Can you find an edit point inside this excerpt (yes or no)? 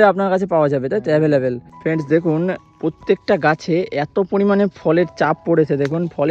yes